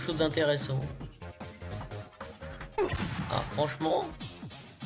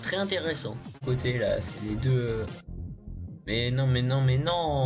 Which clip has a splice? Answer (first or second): second